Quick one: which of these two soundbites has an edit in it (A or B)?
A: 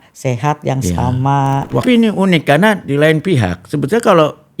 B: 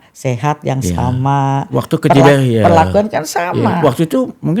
A